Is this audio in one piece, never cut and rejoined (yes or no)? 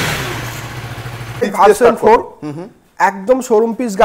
no